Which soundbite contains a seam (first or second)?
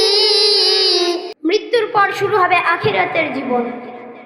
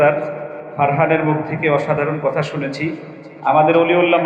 first